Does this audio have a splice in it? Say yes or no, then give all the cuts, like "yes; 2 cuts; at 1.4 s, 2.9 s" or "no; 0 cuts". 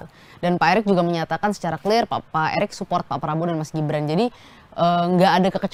no; 0 cuts